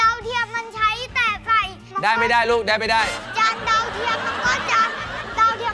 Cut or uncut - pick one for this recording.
cut